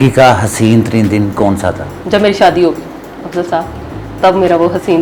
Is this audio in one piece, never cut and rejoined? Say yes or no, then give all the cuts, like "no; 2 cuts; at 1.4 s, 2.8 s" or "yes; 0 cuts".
yes; 0 cuts